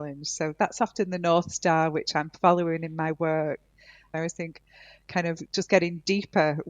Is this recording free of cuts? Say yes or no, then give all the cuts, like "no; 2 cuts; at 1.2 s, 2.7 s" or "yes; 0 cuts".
no; 1 cut; at 4.0 s